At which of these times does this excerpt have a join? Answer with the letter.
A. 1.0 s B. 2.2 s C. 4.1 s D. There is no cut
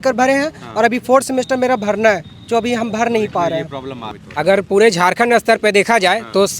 C